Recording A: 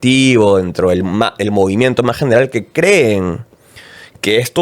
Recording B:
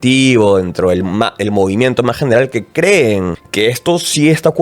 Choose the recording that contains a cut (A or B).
B